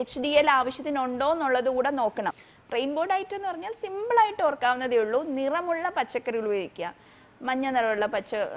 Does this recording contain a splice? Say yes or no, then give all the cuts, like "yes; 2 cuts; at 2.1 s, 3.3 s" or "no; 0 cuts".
yes; 1 cut; at 2.4 s